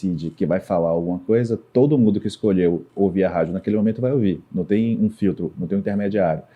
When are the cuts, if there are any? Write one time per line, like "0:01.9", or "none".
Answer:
none